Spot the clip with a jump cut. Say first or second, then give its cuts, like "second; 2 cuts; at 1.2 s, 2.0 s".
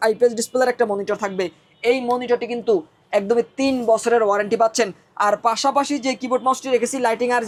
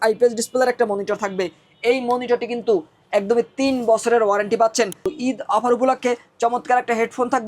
second; 1 cut; at 5.1 s